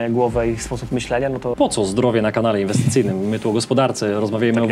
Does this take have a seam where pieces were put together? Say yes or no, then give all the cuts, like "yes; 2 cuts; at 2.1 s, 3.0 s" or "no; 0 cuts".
yes; 1 cut; at 1.5 s